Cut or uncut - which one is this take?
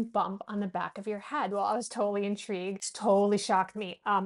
cut